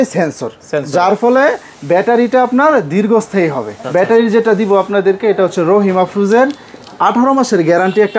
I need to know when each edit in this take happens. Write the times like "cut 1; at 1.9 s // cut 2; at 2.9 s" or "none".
cut 1; at 3.7 s